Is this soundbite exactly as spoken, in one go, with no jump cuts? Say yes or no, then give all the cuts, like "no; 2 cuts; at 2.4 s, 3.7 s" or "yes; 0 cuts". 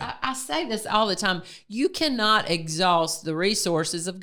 yes; 0 cuts